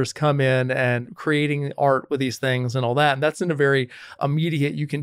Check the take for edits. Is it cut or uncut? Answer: cut